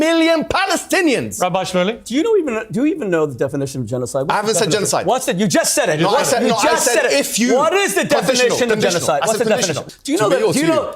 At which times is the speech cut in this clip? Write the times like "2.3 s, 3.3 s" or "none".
9.8 s